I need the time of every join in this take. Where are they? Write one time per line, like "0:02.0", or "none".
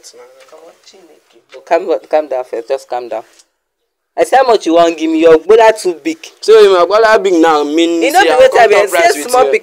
0:01.6